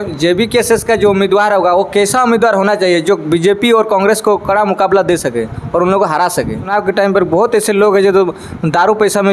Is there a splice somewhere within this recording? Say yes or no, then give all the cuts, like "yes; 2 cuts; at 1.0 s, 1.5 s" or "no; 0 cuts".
yes; 1 cut; at 6.7 s